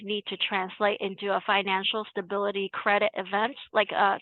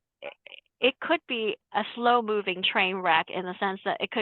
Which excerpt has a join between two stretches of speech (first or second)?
second